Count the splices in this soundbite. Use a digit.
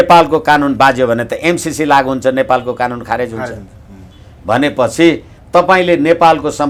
0